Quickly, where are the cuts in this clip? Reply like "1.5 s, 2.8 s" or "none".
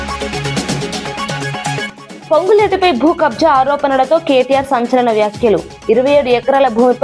1.9 s